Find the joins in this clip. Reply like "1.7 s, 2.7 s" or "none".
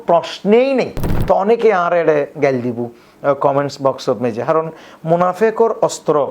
1.1 s